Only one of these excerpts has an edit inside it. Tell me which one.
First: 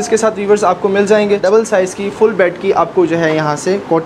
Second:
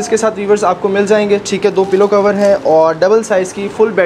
first; 1 cut; at 1.4 s

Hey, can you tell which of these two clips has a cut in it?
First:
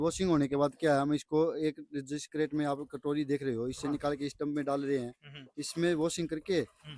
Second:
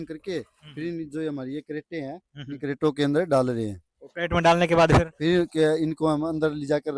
first; 1 cut; at 2.6 s

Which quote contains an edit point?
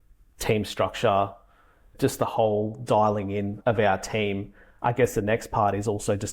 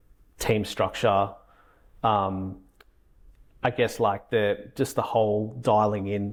first; 3 cuts; at 1.9 s, 3.5 s, 4.6 s

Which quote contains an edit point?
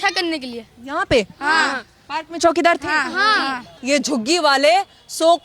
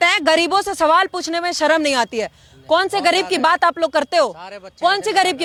first; 1 cut; at 3.7 s

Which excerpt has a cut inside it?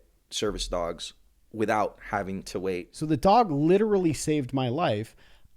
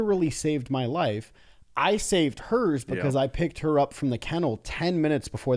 first; 1 cut; at 2.9 s

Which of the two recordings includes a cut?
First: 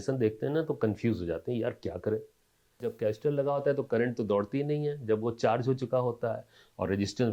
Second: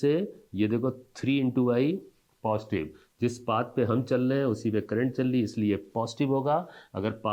first; 1 cut; at 2.9 s

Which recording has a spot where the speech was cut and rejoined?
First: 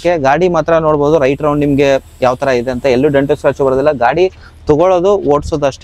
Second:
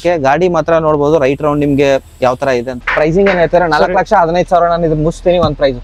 second; 1 cut; at 2.7 s

